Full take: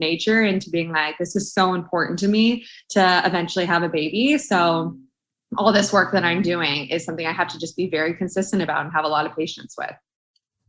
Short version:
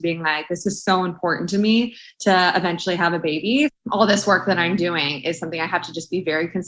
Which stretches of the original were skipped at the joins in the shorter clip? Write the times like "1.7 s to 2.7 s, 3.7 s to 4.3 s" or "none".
4.4 s to 5.4 s